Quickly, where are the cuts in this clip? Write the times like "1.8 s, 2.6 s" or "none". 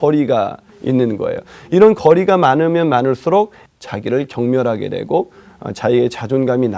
3.6 s